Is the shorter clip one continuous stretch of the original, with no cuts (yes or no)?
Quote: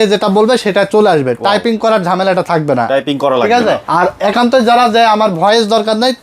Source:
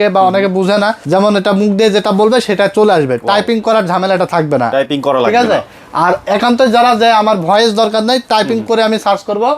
no